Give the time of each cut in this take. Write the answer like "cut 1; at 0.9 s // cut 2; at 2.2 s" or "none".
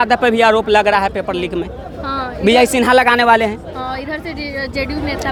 none